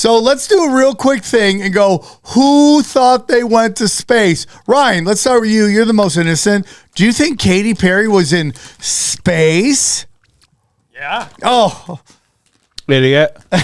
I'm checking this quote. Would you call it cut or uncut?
uncut